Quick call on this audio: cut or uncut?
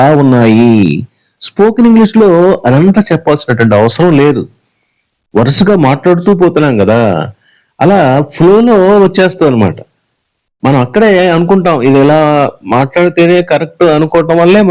uncut